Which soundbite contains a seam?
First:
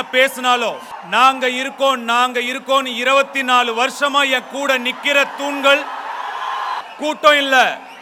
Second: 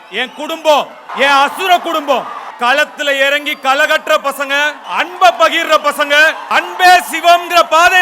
second; 3 cuts; at 2.4 s, 4.8 s, 6.4 s

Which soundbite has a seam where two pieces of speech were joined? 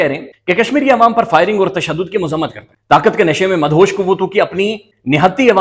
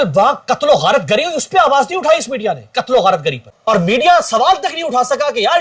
second; 1 cut; at 3.5 s

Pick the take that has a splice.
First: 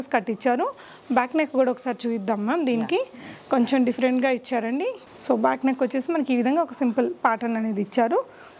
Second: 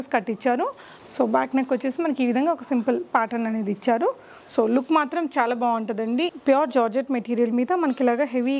second; 2 cuts; at 0.9 s, 6.3 s

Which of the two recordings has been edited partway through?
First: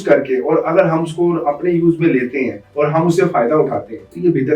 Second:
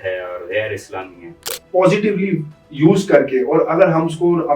second; 1 cut; at 1.6 s

